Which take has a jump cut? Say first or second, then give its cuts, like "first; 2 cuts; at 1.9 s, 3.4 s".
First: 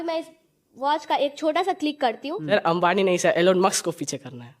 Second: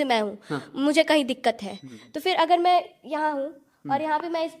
first; 1 cut; at 2.3 s